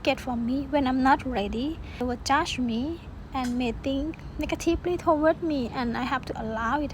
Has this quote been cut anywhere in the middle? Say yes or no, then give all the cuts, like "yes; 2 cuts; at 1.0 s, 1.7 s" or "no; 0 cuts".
yes; 1 cut; at 2.0 s